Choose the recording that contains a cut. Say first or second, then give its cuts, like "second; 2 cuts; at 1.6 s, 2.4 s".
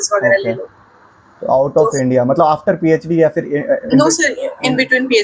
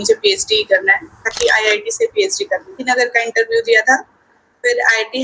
second; 2 cuts; at 1.3 s, 2.8 s